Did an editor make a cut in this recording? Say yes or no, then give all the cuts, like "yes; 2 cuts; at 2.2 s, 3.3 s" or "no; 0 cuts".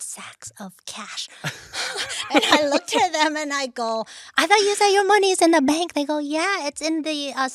no; 0 cuts